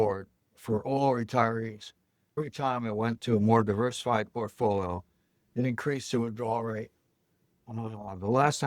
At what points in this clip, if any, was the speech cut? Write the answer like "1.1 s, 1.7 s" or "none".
2.4 s